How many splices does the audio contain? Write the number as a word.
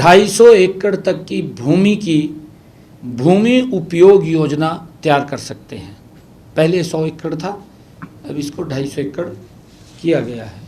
zero